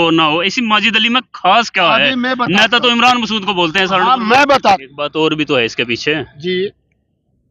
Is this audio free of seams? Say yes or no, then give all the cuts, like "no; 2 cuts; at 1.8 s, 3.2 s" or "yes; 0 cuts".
no; 1 cut; at 4.8 s